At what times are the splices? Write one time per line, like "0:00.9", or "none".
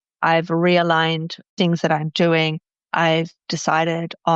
none